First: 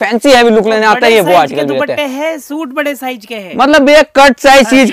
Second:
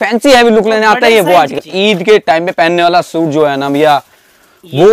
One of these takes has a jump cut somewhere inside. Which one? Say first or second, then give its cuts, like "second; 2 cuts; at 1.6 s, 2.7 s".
second; 1 cut; at 1.6 s